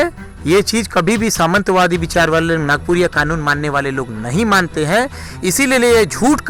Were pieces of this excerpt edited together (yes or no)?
no